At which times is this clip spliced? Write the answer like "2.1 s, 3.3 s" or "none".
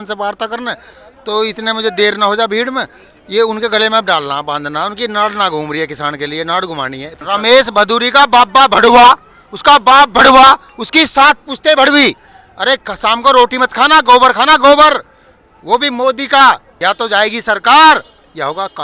7.2 s, 12.3 s, 16.7 s